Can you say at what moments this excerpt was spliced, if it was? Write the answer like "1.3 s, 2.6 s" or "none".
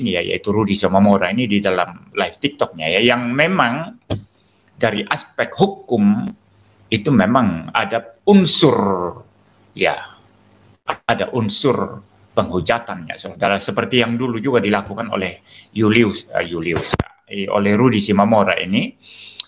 none

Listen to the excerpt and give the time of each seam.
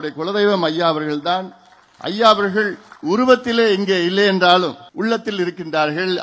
2.9 s, 4.8 s

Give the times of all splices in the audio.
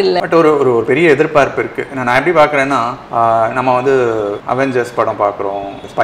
none

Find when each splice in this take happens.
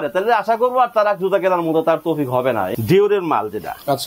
2.7 s

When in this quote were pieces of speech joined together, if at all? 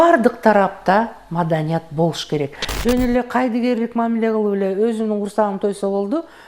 2.7 s

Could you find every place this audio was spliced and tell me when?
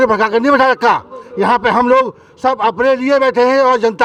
none

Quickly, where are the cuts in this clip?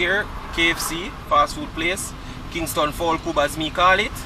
none

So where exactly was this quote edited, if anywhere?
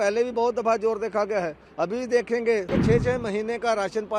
2.7 s

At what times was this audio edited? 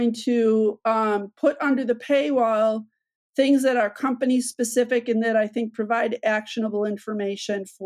none

